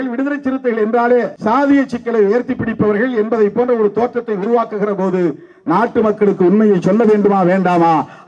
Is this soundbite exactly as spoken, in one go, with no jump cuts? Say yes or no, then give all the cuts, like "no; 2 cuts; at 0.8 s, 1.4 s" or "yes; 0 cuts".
no; 1 cut; at 1.3 s